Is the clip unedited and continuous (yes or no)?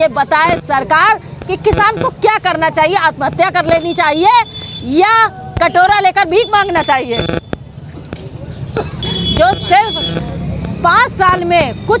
no